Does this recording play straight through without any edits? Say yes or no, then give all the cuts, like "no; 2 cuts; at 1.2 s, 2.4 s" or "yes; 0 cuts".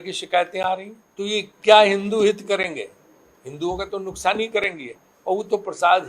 no; 1 cut; at 1.0 s